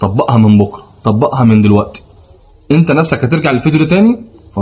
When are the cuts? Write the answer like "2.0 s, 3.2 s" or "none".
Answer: none